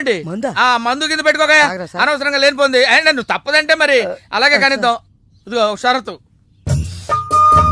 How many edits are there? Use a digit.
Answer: 0